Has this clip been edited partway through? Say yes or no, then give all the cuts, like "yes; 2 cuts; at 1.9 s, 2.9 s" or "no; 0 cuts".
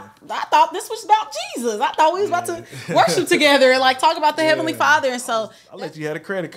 yes; 1 cut; at 5.6 s